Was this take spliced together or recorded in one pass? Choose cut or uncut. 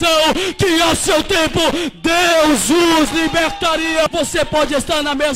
cut